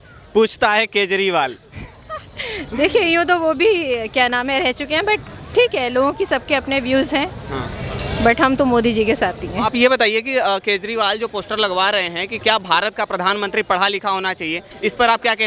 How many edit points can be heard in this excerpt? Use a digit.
0